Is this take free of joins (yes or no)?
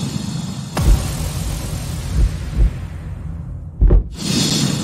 yes